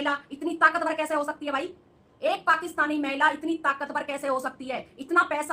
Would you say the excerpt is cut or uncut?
uncut